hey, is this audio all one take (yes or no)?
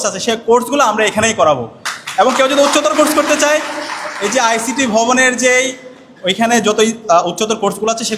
yes